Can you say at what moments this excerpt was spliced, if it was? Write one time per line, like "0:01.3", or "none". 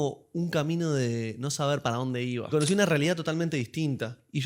0:02.5

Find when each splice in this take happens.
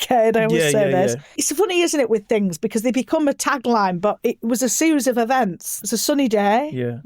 0:01.4
0:05.7

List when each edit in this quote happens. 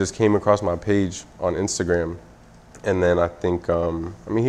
none

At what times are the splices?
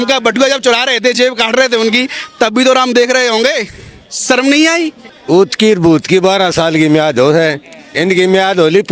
0:05.0

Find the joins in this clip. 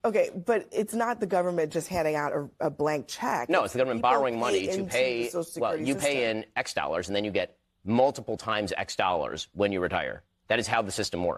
none

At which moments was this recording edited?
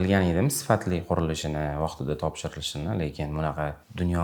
none

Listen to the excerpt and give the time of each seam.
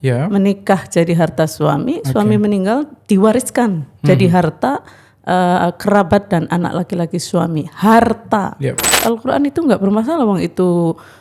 0:08.9

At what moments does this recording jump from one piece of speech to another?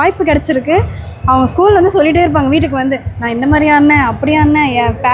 none

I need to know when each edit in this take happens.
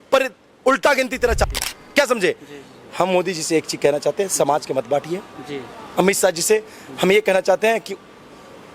0:01.4

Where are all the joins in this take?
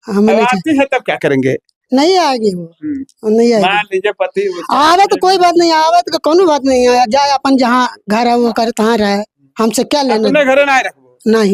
none

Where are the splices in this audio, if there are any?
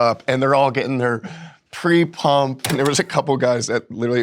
0:02.7

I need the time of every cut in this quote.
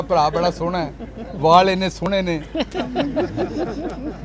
none

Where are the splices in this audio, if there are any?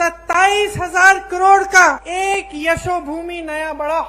0:02.0

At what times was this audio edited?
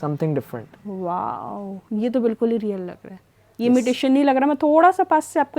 none

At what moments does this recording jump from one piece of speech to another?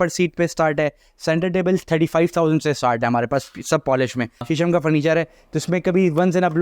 0:04.4

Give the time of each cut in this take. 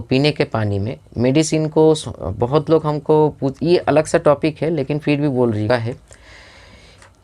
0:05.7

